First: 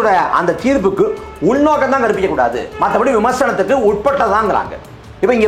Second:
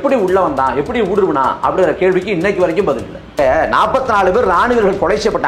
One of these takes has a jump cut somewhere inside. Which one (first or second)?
second